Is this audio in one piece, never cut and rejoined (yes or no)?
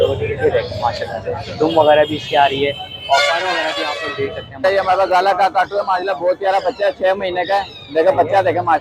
no